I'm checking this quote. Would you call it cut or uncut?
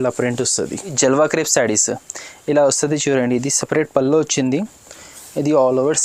cut